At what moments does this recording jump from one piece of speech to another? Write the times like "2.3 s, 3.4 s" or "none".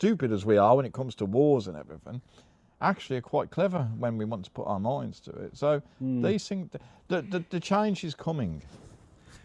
none